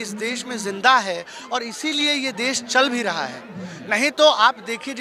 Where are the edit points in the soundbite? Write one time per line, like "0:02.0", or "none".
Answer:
none